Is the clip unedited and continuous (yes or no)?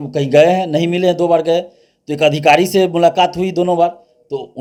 yes